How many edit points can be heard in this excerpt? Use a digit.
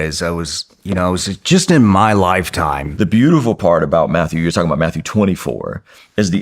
1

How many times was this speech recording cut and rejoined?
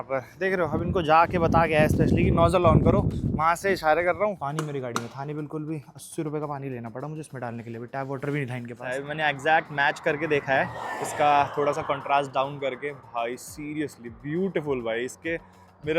2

